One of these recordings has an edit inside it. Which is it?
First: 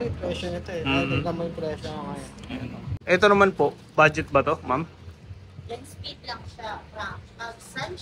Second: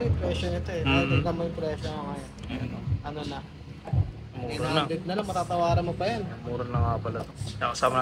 first; 1 cut; at 2.9 s

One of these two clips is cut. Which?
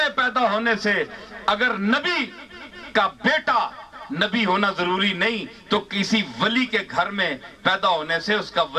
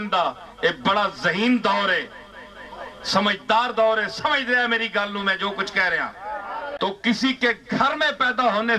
second; 1 cut; at 6.7 s

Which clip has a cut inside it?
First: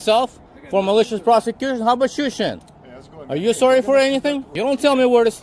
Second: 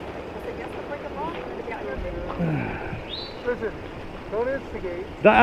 first; 1 cut; at 4.5 s

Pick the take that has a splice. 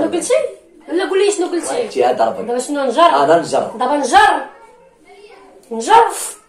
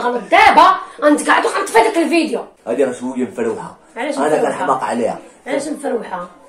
second; 1 cut; at 2.5 s

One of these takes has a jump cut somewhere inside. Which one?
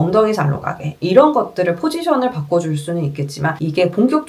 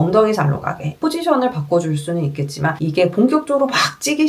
second; 1 cut; at 1.0 s

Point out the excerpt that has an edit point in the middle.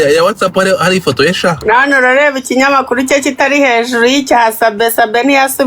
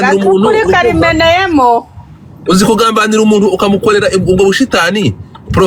first; 1 cut; at 1.6 s

